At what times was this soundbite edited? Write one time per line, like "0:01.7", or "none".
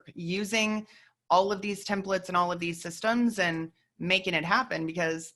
none